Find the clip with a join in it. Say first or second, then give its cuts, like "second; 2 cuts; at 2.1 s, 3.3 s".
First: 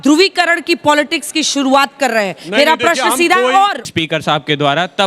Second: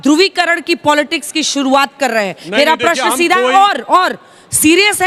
first; 1 cut; at 3.8 s